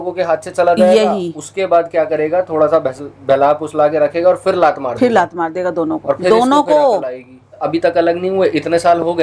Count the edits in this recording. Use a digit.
1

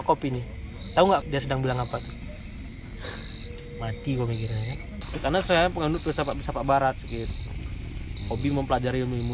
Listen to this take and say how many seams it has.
3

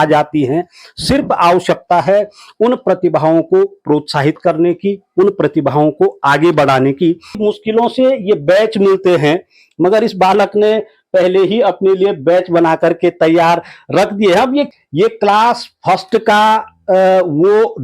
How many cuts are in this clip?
2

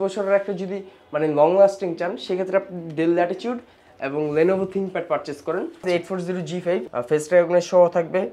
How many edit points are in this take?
2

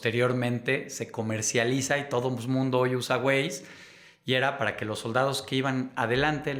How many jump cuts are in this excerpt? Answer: 0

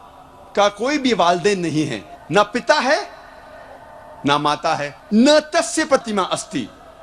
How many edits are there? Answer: 1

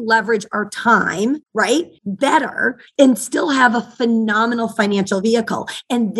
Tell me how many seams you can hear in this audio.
2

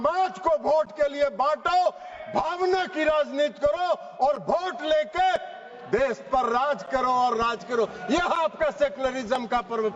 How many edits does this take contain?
0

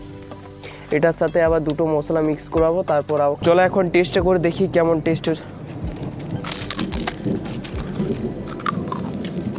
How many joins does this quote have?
1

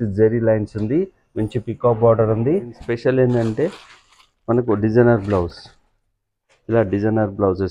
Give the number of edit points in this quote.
1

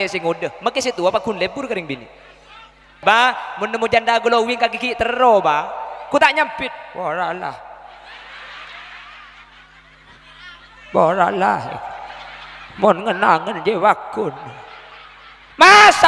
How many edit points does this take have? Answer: 1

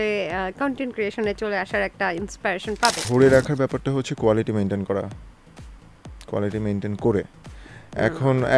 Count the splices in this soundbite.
1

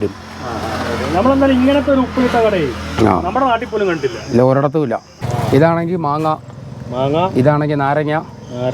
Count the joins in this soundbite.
1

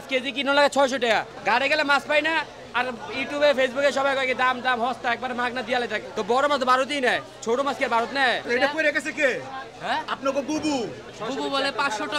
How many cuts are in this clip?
4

